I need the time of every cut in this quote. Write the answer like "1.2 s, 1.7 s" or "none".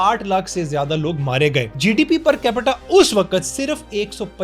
1.7 s